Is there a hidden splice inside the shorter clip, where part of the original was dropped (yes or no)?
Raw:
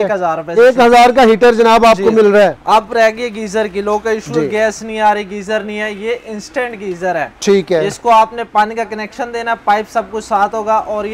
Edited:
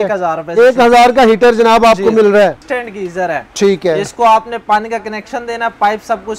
yes